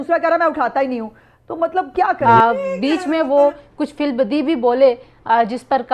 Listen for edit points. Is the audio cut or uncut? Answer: cut